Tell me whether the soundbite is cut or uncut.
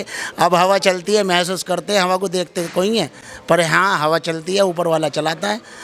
uncut